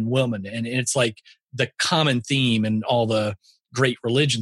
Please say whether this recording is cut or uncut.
uncut